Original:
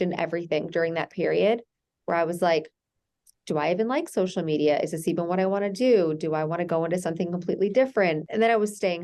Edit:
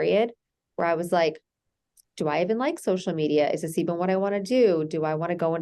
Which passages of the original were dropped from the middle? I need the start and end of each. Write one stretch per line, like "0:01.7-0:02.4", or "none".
none